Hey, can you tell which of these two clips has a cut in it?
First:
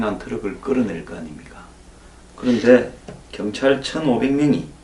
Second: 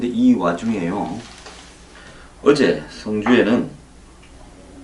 first; 1 cut; at 2.1 s

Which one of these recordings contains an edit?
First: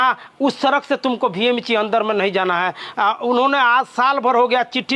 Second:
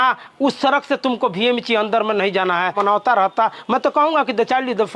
second; 1 cut; at 2.8 s

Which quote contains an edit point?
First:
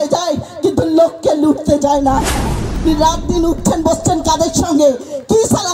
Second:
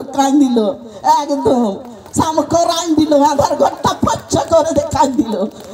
first; 1 cut; at 2.8 s

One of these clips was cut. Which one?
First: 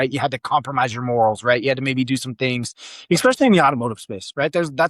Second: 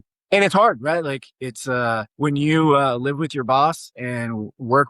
second; 1 cut; at 2.1 s

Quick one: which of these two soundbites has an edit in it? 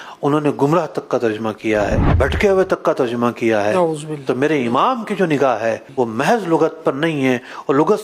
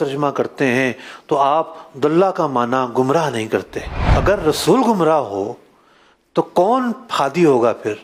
first; 2 cuts; at 2.1 s, 5.8 s

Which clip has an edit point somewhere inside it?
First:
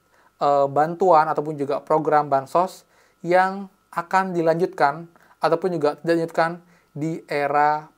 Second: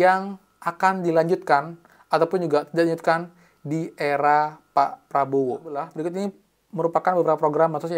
second; 1 cut; at 5.9 s

